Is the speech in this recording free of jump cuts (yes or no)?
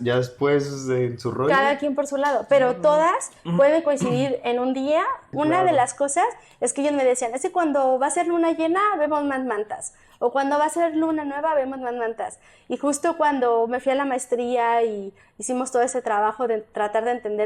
no